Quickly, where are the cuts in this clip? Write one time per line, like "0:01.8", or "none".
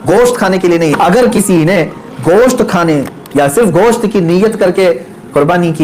0:00.9